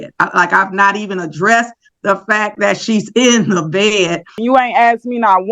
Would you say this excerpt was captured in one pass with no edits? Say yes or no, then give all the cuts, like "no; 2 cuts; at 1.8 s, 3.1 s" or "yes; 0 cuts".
no; 1 cut; at 4.4 s